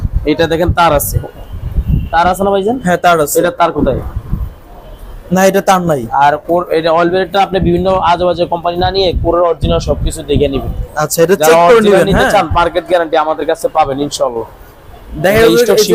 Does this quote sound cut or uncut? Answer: uncut